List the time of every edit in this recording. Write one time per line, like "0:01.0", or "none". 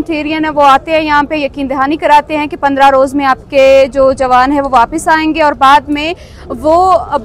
none